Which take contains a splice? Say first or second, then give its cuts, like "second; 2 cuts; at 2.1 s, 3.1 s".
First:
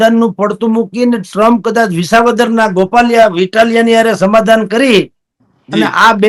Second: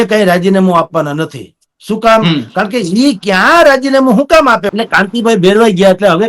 second; 1 cut; at 4.7 s